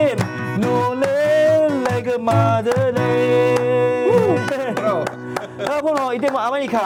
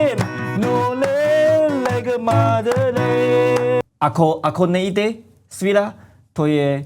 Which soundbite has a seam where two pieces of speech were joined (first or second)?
second